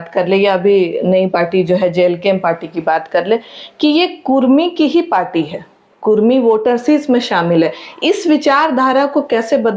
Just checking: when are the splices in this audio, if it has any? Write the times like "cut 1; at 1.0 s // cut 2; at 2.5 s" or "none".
none